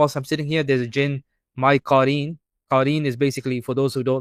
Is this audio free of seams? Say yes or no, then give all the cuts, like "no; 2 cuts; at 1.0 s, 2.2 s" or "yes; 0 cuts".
yes; 0 cuts